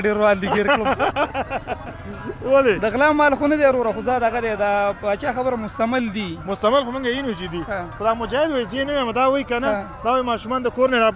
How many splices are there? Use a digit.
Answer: 0